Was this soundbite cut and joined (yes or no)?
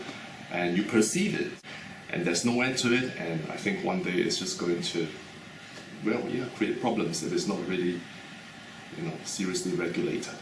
yes